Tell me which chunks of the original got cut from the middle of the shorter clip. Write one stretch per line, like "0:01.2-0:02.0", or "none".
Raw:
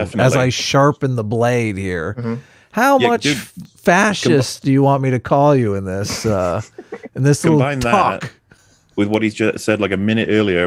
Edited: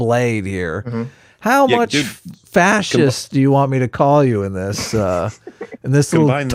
none